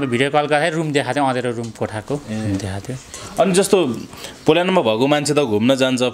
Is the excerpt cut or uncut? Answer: uncut